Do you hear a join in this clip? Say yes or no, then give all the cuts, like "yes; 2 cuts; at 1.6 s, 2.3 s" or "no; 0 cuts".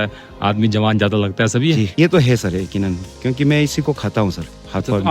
yes; 1 cut; at 1.9 s